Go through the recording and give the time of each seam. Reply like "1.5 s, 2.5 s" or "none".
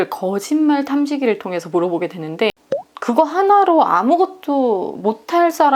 2.5 s